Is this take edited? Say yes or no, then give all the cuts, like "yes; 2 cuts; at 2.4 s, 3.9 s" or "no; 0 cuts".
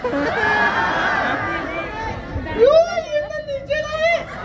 no; 0 cuts